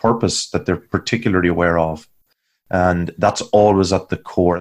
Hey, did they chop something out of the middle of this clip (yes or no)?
no